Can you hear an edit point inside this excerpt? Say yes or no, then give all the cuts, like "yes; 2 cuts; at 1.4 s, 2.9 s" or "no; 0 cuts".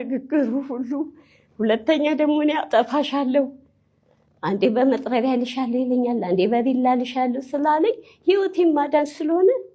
no; 0 cuts